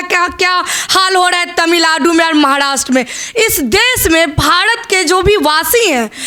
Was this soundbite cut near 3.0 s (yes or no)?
no